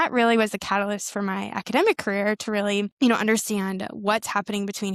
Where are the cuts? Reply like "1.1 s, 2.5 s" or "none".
none